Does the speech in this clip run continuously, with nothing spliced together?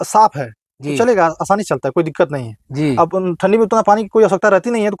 yes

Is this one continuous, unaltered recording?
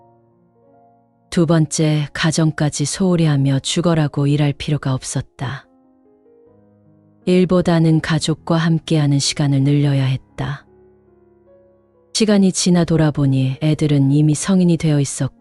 no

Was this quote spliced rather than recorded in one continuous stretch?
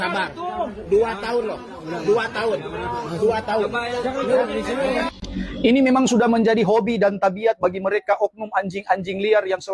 yes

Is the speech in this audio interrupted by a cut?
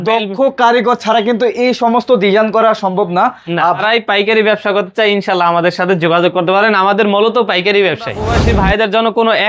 yes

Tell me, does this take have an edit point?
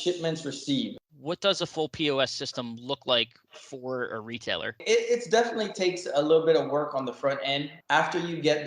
yes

